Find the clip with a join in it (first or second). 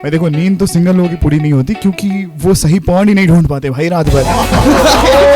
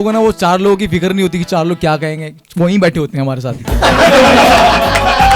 first